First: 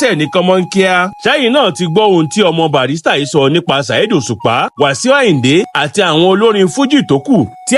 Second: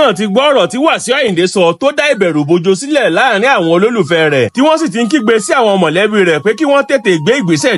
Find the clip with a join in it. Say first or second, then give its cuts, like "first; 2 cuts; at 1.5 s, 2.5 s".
first; 1 cut; at 1.1 s